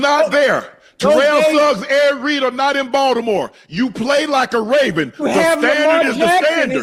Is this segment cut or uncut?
uncut